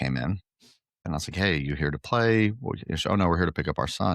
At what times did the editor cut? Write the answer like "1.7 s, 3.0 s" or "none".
1.1 s